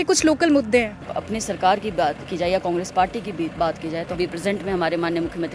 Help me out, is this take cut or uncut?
cut